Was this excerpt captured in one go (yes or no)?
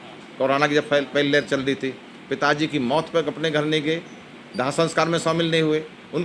yes